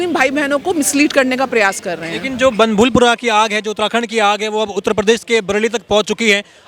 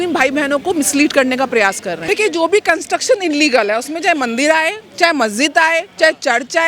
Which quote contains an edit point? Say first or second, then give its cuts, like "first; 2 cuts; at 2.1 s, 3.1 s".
second; 1 cut; at 2.0 s